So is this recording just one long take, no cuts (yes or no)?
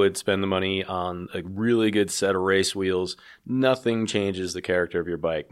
yes